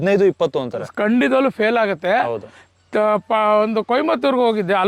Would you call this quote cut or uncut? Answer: uncut